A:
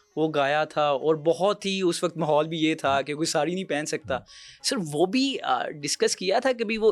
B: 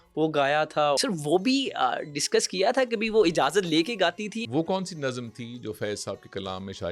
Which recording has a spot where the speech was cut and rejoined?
B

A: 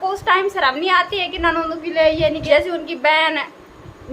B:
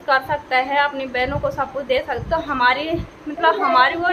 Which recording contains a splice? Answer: A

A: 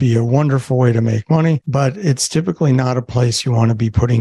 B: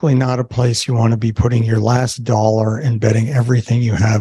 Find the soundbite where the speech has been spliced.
A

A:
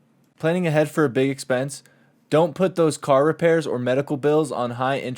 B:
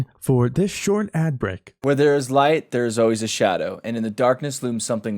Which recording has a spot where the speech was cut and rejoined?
B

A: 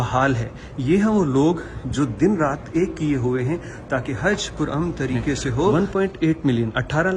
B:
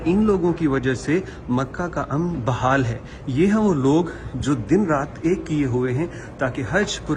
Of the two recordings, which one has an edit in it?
A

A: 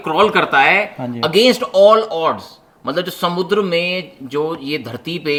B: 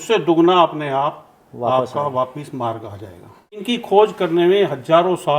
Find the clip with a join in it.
B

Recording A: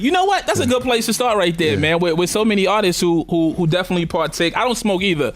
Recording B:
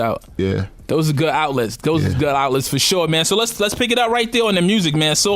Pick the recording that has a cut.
B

